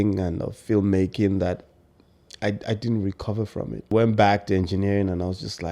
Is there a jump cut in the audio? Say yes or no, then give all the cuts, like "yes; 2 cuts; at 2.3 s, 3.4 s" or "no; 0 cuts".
yes; 1 cut; at 3.9 s